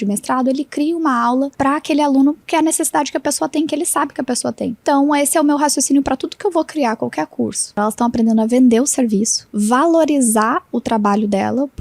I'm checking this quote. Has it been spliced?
yes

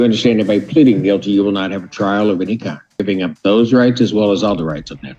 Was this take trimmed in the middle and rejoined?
yes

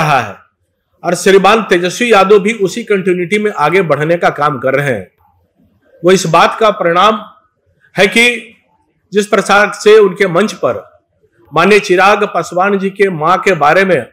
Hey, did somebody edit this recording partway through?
no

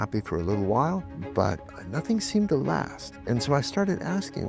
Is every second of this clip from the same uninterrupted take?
yes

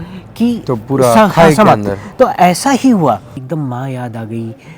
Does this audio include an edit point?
yes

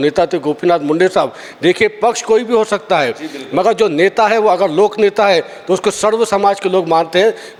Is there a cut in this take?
no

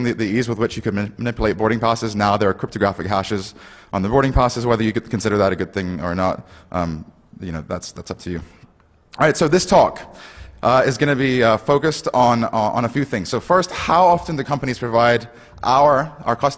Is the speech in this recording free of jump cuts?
no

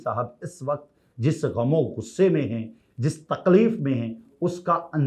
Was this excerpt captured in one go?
yes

